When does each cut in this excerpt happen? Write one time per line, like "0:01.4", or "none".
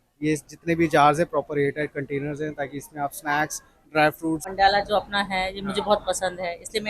0:04.5